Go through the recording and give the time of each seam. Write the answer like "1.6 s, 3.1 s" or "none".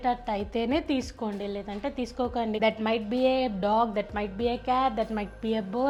none

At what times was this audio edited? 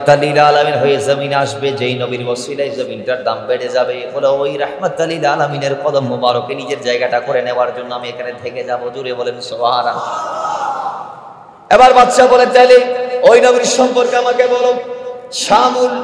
none

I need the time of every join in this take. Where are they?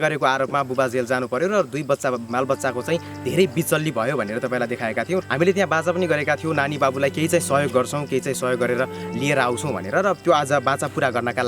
5.2 s

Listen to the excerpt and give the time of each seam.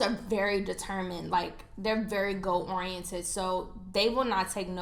none

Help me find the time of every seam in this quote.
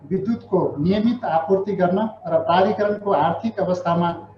none

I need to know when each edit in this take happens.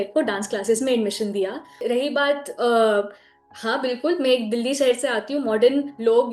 1.8 s

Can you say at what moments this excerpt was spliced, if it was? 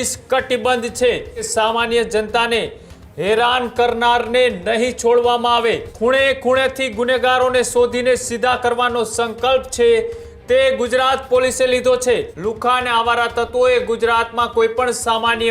1.4 s, 5.9 s, 12.3 s

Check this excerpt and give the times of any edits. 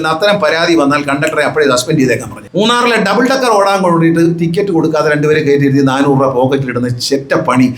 2.4 s

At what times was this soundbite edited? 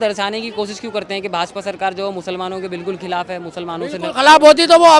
none

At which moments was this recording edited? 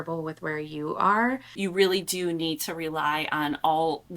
1.5 s

